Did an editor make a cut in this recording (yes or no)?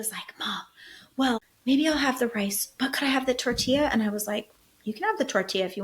yes